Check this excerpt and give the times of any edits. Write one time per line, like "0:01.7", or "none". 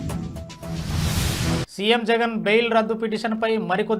0:01.7